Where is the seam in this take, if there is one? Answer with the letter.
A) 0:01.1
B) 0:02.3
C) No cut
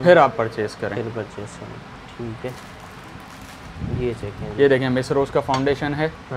C